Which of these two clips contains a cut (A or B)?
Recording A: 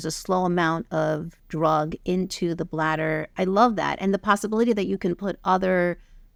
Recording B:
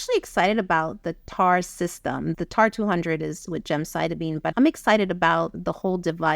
B